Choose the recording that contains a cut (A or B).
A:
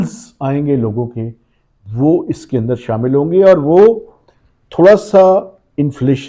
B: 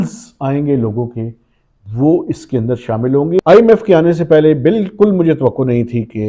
B